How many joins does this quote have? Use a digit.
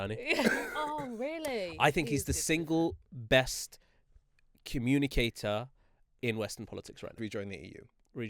1